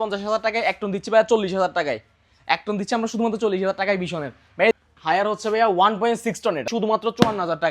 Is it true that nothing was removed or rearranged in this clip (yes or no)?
no